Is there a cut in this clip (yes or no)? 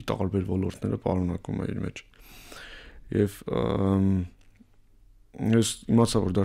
no